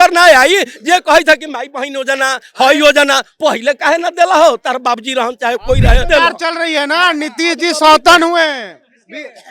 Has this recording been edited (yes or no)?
yes